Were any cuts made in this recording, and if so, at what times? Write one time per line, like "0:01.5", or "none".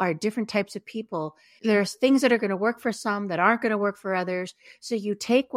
0:01.5